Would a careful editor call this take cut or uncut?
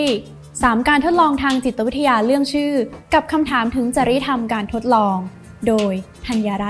uncut